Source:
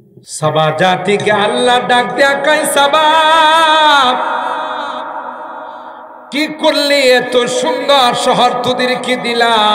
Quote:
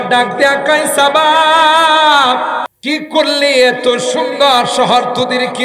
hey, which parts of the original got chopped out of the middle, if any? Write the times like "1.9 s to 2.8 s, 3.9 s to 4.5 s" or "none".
4.5 s to 6.2 s